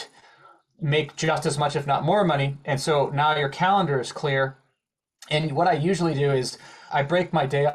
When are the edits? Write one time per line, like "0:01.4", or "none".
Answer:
0:06.8